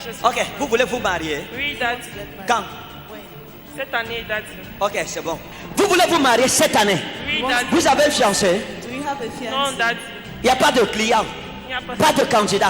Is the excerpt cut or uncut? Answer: uncut